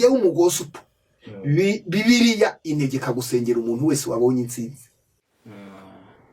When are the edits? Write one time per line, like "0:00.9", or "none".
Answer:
0:05.2